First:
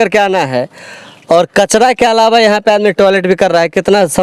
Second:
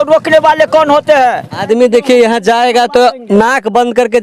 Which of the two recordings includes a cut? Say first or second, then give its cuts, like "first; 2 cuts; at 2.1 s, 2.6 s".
second; 1 cut; at 1.6 s